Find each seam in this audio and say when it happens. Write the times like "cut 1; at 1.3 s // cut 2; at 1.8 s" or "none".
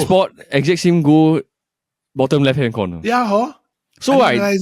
none